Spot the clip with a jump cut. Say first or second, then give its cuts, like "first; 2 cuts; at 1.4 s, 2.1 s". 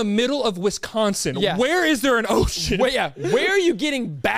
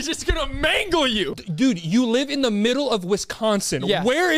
second; 1 cut; at 1.4 s